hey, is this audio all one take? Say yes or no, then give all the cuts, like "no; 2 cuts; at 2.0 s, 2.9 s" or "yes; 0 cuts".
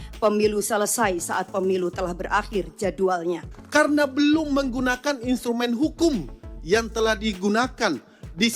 no; 1 cut; at 3.5 s